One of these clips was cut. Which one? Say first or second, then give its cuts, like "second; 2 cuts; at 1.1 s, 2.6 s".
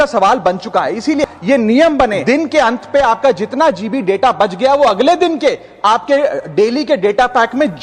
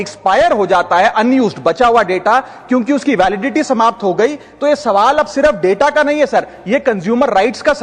first; 2 cuts; at 1.2 s, 2.2 s